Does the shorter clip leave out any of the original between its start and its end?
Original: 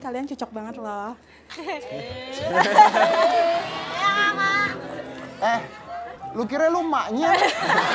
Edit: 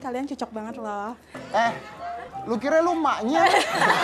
yes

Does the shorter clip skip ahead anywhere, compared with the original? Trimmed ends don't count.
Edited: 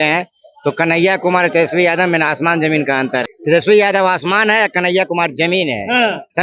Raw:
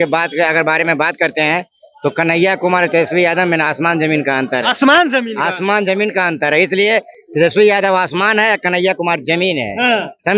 yes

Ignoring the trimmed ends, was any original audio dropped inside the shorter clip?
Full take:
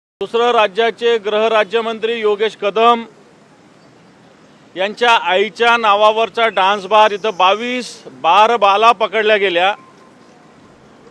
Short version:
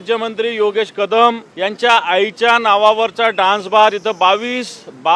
yes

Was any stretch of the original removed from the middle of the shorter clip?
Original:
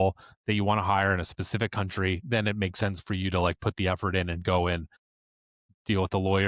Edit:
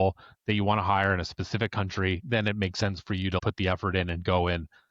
yes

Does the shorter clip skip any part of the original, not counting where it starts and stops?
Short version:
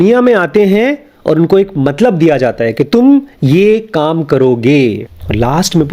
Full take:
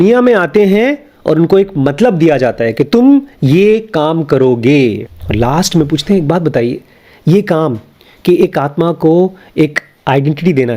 no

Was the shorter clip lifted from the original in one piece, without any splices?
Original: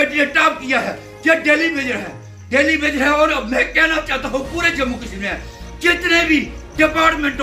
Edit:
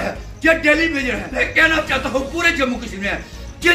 no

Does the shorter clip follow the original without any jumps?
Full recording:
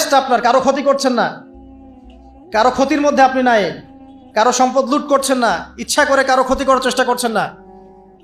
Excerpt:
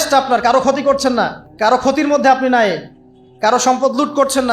no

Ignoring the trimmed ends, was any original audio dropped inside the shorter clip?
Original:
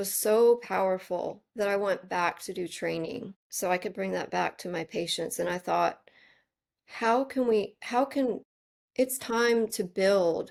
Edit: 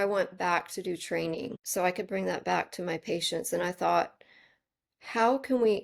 yes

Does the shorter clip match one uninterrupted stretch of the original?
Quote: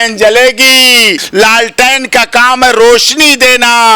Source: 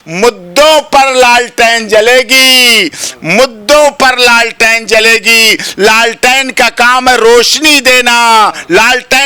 no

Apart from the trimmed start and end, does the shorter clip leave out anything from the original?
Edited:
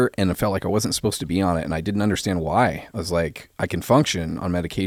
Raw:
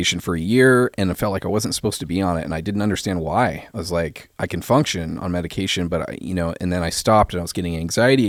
no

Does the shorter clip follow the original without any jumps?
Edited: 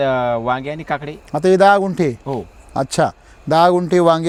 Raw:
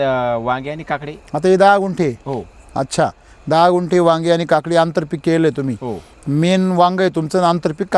yes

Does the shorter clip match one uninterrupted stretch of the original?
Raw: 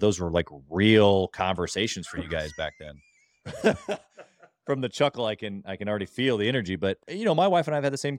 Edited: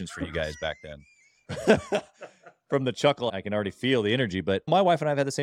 no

